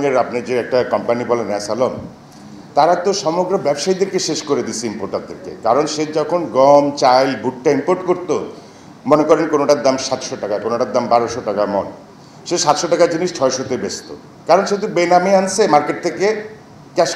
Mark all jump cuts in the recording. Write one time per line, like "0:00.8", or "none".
none